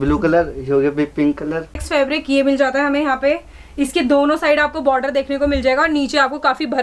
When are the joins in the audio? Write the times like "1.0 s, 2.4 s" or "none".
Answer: 1.7 s